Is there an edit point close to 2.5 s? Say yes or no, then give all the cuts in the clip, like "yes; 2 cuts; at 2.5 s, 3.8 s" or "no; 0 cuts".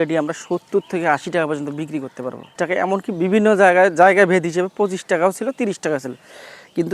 yes; 1 cut; at 2.5 s